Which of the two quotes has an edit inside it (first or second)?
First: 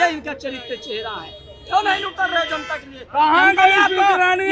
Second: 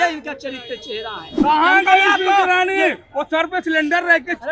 second